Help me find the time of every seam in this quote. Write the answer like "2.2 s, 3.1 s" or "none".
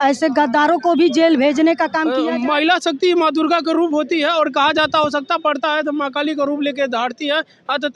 2.2 s